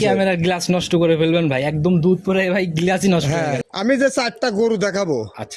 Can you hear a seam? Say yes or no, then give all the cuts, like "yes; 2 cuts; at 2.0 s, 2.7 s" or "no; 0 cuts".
yes; 1 cut; at 3.6 s